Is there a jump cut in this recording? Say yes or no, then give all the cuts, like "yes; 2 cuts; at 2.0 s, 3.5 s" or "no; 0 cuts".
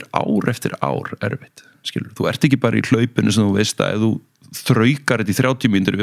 no; 0 cuts